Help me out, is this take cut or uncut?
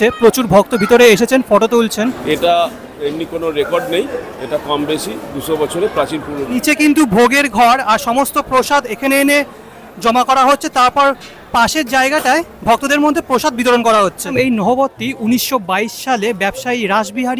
cut